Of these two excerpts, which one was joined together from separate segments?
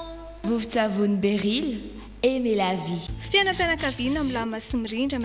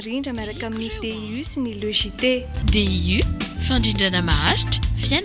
first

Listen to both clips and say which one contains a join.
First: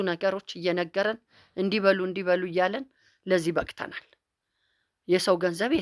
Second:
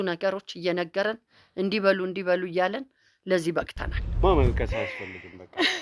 second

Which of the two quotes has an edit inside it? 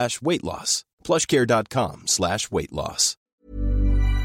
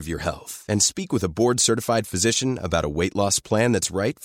first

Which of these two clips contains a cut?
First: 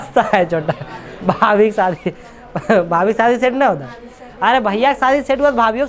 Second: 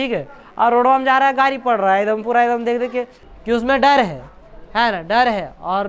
second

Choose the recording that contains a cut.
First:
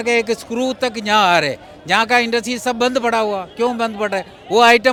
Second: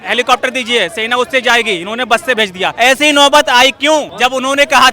second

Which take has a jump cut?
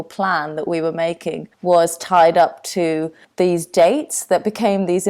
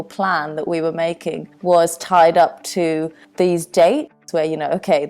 second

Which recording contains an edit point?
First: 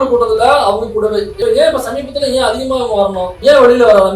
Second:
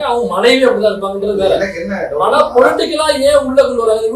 first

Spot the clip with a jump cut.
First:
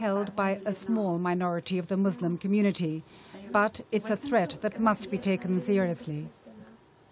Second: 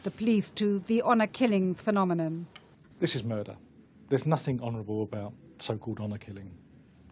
second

